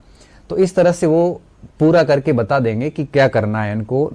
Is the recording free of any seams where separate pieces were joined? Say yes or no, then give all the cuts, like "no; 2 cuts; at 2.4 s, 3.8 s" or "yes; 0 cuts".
yes; 0 cuts